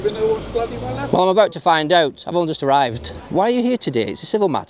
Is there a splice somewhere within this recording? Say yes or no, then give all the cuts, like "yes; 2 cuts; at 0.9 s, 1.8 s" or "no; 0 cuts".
yes; 1 cut; at 3.2 s